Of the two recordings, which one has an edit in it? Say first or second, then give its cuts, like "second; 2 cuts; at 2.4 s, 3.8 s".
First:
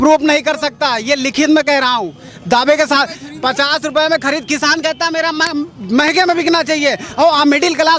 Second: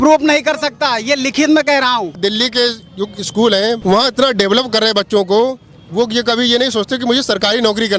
second; 2 cuts; at 2.2 s, 3.8 s